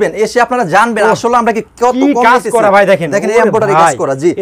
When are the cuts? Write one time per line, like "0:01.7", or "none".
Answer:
none